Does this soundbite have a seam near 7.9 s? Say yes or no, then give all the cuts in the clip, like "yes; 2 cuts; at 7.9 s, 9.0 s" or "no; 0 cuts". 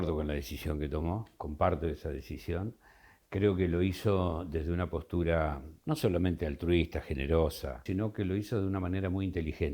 yes; 1 cut; at 7.9 s